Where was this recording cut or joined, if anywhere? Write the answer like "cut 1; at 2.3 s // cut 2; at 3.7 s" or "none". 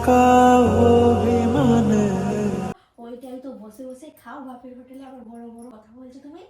cut 1; at 2.8 s // cut 2; at 5.7 s